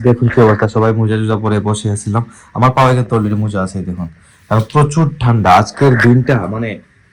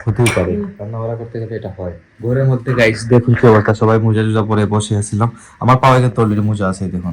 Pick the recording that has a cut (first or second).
second